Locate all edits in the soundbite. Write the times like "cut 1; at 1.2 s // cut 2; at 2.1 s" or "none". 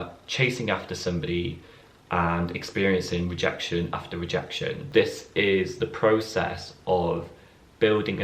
cut 1; at 4.8 s